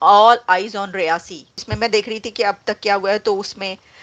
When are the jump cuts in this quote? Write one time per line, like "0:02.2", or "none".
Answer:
0:01.7